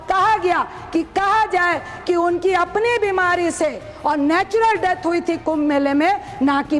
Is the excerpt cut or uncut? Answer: uncut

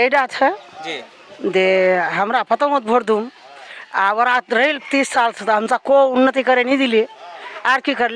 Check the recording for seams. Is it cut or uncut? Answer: uncut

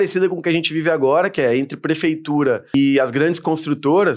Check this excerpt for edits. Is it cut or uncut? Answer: cut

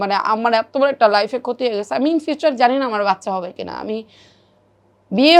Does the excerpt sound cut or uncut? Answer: uncut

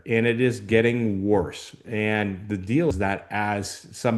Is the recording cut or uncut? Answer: uncut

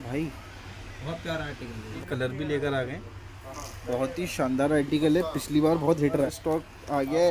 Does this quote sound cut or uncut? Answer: cut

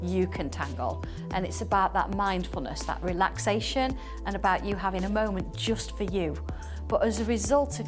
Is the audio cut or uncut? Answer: uncut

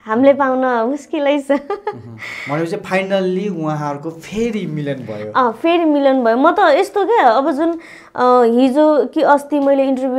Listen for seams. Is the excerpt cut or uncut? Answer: uncut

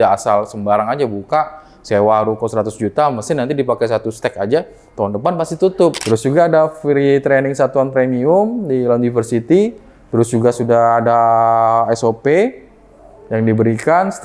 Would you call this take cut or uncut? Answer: cut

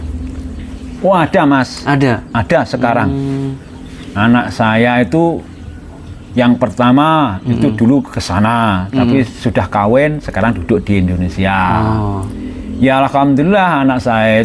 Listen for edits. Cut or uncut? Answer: uncut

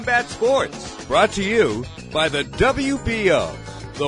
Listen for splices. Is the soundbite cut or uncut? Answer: cut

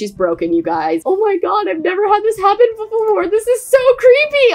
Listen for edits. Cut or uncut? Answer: uncut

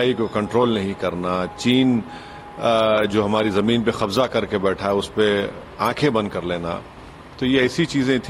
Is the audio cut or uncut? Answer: uncut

